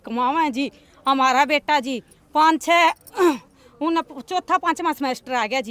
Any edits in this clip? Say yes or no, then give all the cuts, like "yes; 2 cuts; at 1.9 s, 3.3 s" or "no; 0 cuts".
no; 0 cuts